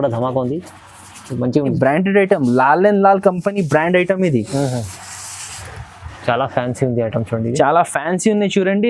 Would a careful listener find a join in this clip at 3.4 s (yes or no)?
no